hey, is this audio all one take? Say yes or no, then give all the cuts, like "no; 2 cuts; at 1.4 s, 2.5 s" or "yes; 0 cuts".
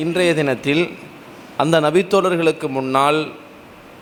yes; 0 cuts